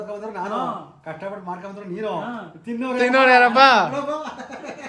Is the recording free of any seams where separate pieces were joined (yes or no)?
yes